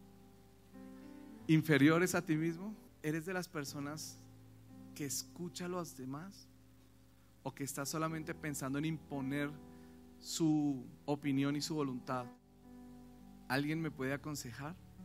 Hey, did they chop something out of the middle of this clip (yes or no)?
yes